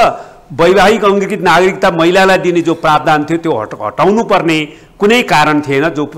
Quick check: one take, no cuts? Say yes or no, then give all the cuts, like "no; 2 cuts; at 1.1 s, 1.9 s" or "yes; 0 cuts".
yes; 0 cuts